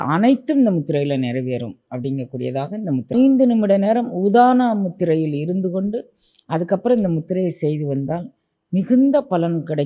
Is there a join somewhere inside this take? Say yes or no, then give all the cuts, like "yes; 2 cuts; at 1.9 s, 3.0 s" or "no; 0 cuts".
yes; 1 cut; at 3.1 s